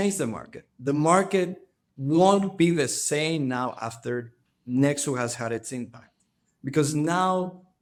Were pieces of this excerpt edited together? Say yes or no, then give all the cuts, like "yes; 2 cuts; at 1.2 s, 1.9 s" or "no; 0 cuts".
no; 0 cuts